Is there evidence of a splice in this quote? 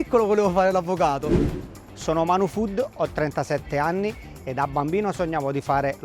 yes; 1 cut; at 1.5 s

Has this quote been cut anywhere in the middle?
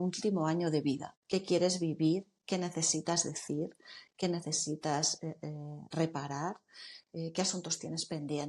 yes; 1 cut; at 1.1 s

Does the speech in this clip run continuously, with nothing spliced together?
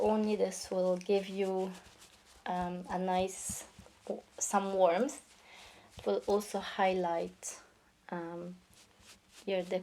yes; 0 cuts

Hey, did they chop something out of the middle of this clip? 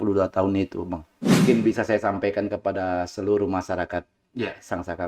yes; 1 cut; at 1.4 s

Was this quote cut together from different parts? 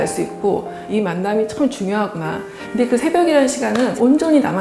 yes; 2 cuts; at 0.8 s, 2.5 s

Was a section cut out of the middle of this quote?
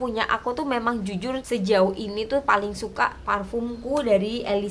yes; 1 cut; at 1.4 s

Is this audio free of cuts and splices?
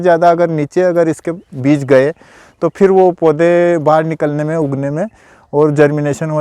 yes; 0 cuts

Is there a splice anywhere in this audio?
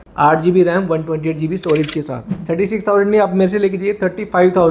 yes; 1 cut; at 2.3 s

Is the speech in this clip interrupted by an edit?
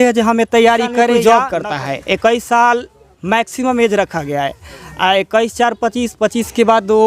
yes; 1 cut; at 1.2 s

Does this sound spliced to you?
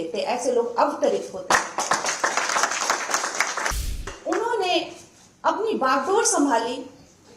yes; 1 cut; at 4.1 s

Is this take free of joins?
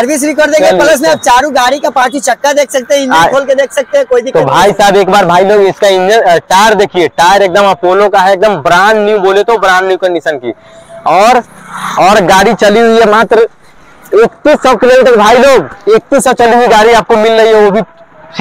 yes; 0 cuts

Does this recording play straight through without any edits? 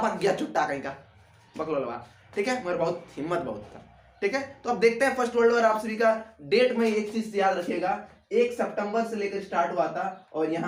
yes; 0 cuts

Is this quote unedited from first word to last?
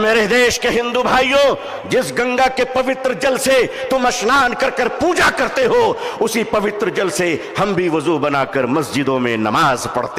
yes; 0 cuts

